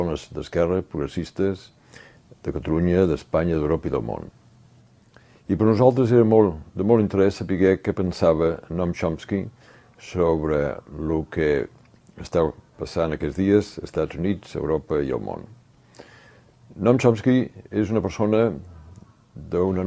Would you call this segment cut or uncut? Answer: uncut